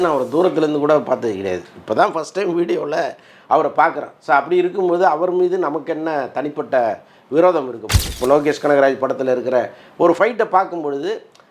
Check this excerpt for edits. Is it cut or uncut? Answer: cut